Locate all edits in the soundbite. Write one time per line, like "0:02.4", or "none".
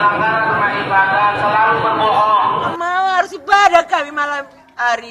0:02.7